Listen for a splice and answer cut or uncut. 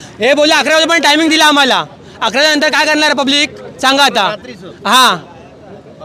uncut